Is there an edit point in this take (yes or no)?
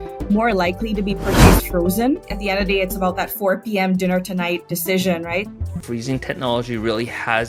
yes